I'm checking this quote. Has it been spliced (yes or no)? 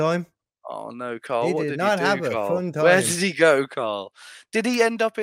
no